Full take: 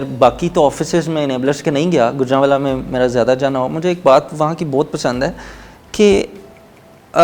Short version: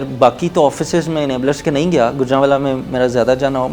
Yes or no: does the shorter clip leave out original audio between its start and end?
no